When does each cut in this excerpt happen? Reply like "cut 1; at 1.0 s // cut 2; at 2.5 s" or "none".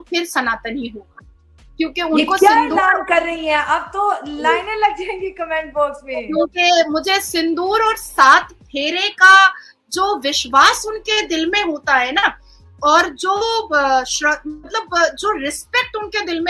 none